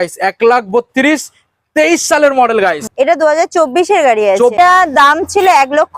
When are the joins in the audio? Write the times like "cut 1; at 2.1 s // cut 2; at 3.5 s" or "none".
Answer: cut 1; at 2.9 s // cut 2; at 4.5 s